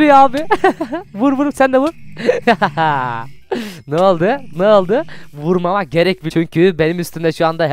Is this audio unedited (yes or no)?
no